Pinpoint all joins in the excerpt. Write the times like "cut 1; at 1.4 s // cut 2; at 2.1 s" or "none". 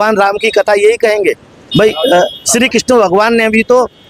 none